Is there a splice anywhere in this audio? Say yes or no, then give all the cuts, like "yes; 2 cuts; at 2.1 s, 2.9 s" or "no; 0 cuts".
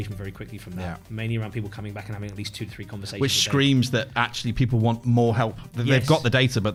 no; 0 cuts